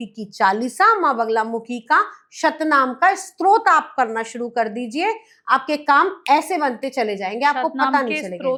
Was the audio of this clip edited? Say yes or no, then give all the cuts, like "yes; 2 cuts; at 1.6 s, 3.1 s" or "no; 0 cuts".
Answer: no; 0 cuts